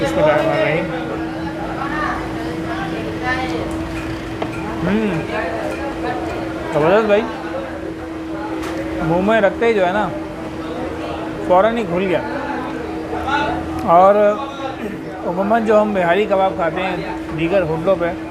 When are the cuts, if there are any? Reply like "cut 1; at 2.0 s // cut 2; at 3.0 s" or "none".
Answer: none